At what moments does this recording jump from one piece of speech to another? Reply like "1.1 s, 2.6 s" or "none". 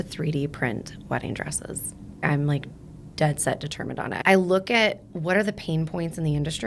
2.2 s, 4.1 s